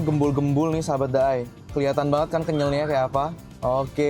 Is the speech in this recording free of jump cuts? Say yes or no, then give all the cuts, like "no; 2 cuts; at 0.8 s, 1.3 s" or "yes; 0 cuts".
yes; 0 cuts